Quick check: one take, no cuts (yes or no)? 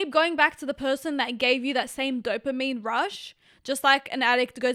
yes